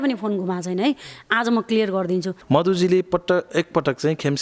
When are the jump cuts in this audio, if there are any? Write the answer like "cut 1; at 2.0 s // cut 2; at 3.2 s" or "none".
cut 1; at 2.4 s